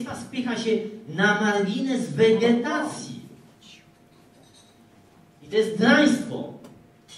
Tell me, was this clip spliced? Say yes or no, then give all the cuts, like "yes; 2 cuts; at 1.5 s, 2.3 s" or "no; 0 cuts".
no; 0 cuts